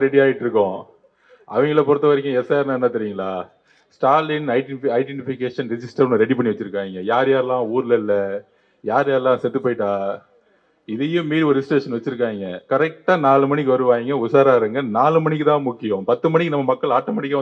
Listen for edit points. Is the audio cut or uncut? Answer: uncut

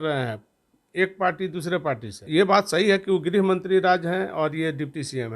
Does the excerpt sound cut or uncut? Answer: cut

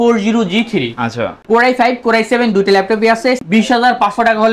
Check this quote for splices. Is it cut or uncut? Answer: cut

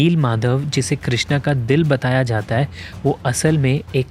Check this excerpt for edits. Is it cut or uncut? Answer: uncut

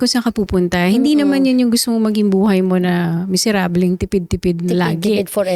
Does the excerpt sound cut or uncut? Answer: uncut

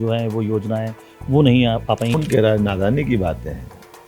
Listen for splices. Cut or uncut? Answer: cut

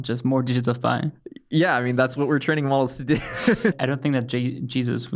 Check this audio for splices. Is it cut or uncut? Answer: cut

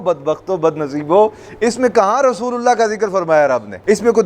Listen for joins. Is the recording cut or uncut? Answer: uncut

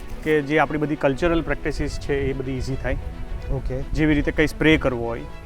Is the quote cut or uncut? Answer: uncut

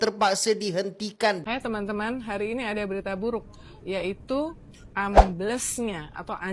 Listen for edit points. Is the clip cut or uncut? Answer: cut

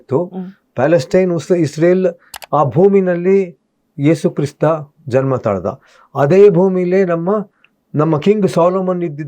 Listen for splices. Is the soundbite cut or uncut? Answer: cut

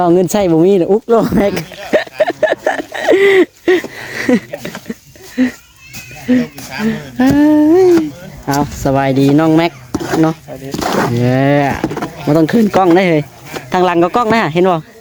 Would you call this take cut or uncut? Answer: uncut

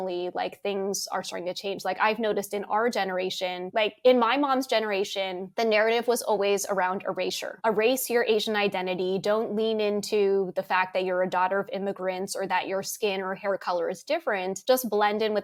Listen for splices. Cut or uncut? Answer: uncut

